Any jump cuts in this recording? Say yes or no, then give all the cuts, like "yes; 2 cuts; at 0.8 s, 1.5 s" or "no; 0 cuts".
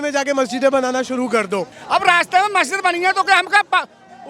yes; 1 cut; at 1.8 s